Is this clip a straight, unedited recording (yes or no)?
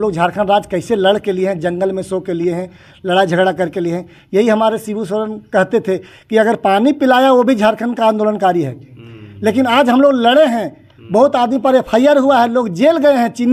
yes